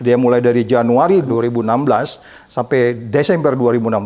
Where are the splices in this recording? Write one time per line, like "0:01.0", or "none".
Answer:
none

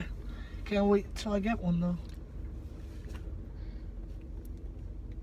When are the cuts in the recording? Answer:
none

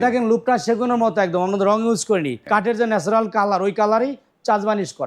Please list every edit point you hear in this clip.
0:02.4

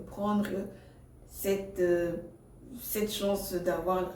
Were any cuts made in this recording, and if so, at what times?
none

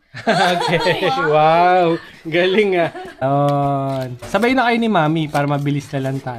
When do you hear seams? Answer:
0:03.1

